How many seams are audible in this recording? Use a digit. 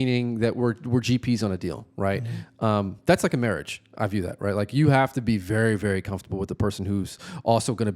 0